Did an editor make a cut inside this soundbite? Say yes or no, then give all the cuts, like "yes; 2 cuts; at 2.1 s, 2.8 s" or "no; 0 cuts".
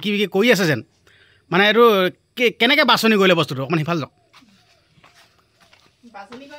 no; 0 cuts